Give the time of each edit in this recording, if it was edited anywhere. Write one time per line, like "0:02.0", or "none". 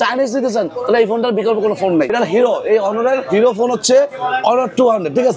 0:02.1